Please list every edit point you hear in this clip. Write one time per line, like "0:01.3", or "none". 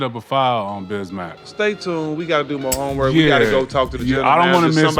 0:01.5